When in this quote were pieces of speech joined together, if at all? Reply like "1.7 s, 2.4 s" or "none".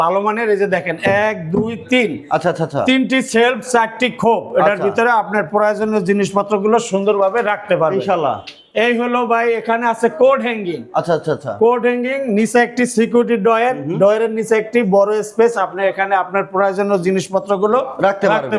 none